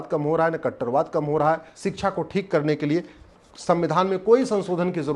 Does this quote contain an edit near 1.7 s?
yes; 1 cut; at 1.7 s

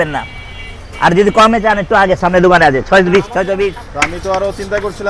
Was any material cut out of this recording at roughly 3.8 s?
yes; 1 cut; at 3.8 s

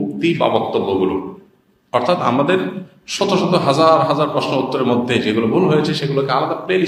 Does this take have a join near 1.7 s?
no; 0 cuts

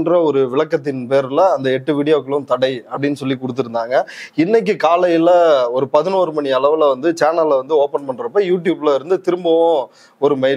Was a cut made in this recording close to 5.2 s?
no; 0 cuts

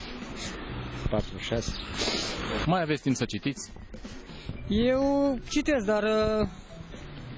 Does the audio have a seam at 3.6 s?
yes; 1 cut; at 3.6 s

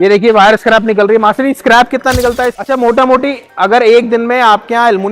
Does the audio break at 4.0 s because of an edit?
no; 1 cut; at 2.5 s

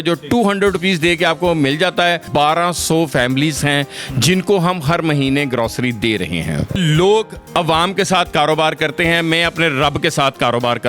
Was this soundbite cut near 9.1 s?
no; 2 cuts; at 2.2 s, 6.8 s

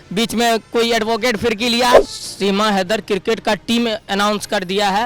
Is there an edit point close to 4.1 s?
no; 1 cut; at 2.0 s

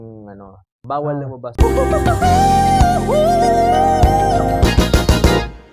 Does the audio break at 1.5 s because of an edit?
yes; 1 cut; at 1.5 s

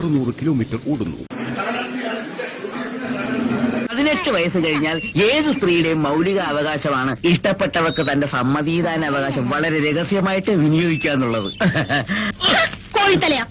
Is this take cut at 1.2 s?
yes; 1 cut; at 1.2 s

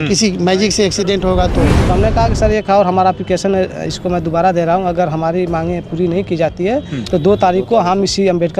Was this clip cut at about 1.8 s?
yes; 1 cut; at 1.8 s

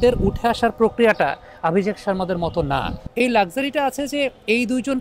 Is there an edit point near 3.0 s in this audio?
yes; 1 cut; at 3.0 s

